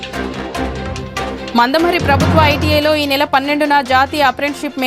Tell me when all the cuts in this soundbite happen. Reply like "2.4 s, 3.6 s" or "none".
none